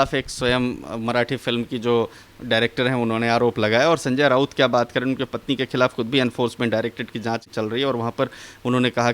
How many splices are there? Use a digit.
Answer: 0